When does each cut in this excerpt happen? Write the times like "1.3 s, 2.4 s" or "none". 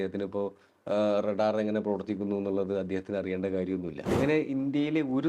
4.0 s